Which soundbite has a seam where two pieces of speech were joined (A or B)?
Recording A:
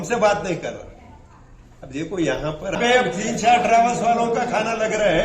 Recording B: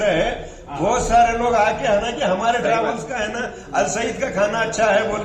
A